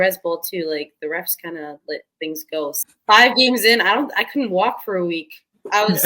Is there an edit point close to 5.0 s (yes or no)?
no